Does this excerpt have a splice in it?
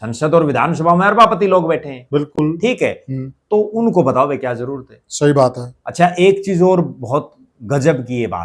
no; 0 cuts

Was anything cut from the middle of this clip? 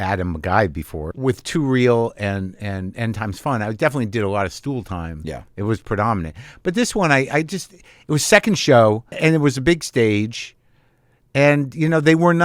yes; 2 cuts; at 1.0 s, 9.1 s

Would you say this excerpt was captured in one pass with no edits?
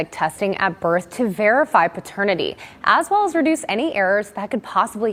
yes; 0 cuts

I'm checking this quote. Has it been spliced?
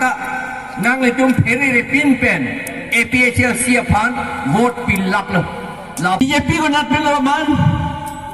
yes; 1 cut; at 6.2 s

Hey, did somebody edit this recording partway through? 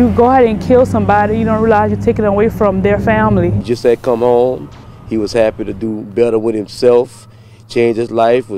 yes; 1 cut; at 3.6 s

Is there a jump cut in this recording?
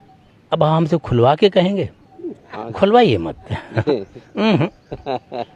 no; 0 cuts

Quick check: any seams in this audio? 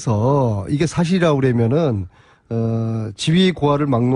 no; 0 cuts

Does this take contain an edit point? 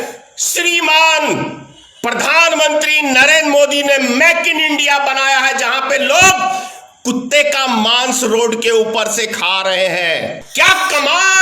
yes; 1 cut; at 10.4 s

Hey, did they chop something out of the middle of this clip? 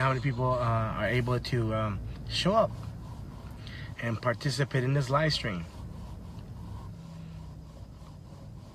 yes; 1 cut; at 5.9 s

